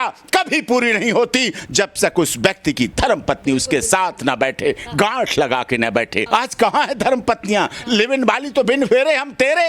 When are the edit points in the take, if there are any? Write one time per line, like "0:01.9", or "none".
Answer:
0:06.2